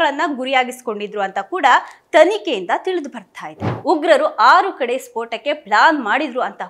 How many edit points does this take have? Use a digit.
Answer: 1